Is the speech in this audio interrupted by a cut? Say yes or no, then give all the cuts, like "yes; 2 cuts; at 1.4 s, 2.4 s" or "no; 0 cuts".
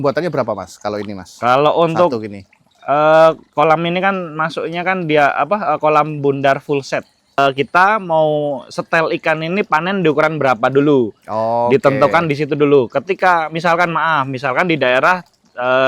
yes; 1 cut; at 7.4 s